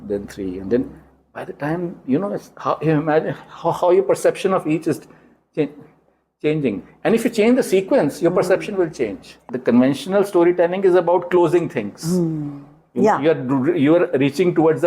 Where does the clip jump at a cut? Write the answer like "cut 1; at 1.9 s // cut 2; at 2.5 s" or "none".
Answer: cut 1; at 9.5 s